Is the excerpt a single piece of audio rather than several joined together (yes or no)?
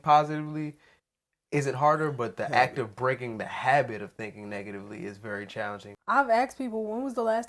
no